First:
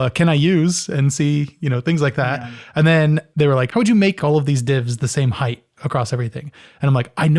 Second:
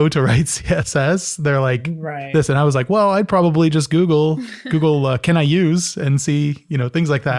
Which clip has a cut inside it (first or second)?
first